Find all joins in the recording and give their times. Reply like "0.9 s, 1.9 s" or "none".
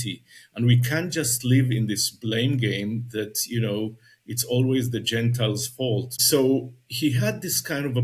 6.2 s